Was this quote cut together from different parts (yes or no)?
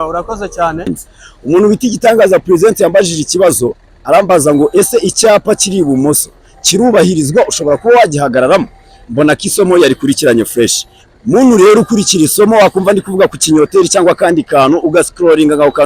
yes